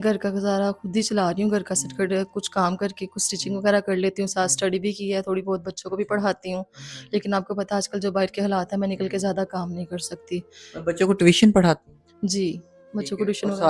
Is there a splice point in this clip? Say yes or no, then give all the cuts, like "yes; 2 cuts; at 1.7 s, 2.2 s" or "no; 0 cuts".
no; 0 cuts